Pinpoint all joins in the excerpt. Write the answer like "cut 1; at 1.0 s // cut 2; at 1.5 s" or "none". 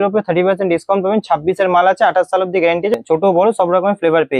cut 1; at 2.9 s